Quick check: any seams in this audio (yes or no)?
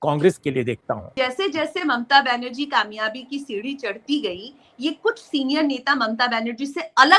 yes